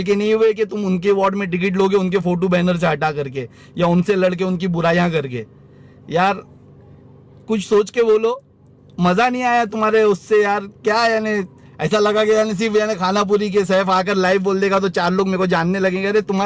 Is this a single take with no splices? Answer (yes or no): yes